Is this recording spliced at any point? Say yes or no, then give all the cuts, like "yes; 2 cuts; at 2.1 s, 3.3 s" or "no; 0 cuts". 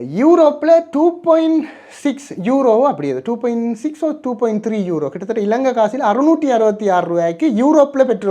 no; 0 cuts